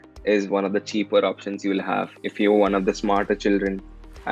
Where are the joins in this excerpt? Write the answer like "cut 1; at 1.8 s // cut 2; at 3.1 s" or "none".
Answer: cut 1; at 2.2 s